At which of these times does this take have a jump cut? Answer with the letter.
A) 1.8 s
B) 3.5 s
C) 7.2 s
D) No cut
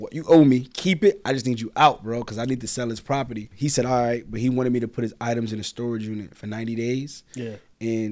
B